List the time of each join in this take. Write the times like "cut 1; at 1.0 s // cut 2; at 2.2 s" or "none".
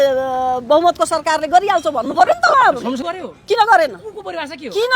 cut 1; at 3.1 s